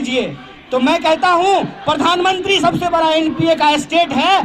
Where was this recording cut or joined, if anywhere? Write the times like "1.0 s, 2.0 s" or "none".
none